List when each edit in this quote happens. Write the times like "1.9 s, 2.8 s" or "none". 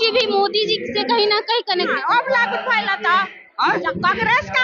1.9 s